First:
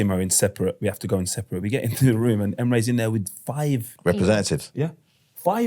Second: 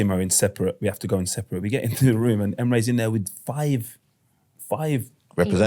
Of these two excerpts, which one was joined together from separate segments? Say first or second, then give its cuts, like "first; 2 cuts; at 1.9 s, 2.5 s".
first; 1 cut; at 3.9 s